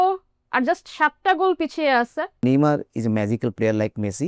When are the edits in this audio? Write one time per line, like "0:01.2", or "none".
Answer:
0:02.4